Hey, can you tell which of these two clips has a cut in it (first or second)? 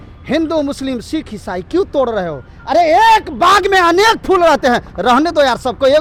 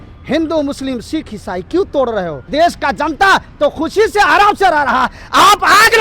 second